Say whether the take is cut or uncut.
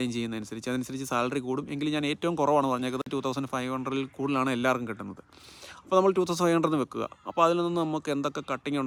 uncut